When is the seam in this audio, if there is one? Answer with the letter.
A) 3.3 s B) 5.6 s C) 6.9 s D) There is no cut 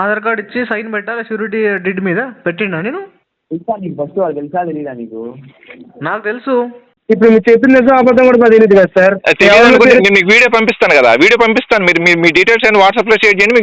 C